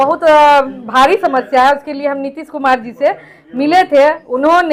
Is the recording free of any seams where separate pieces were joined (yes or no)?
yes